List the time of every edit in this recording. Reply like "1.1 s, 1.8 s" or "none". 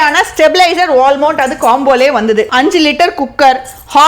2.5 s